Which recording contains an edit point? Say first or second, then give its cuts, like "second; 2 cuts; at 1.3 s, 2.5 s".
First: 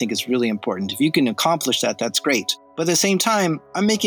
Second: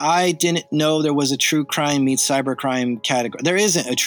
first; 1 cut; at 2.6 s